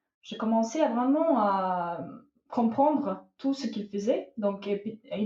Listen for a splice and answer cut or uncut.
uncut